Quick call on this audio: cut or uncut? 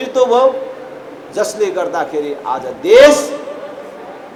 uncut